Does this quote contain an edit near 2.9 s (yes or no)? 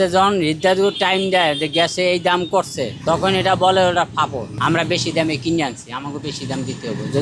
yes